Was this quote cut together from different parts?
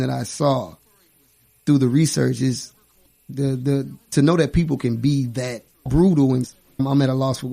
yes; 1 cut; at 5.9 s

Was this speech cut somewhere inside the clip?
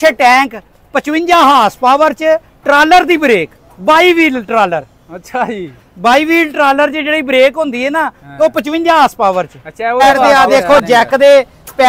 yes; 1 cut; at 10.0 s

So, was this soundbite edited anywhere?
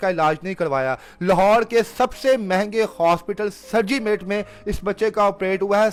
no; 0 cuts

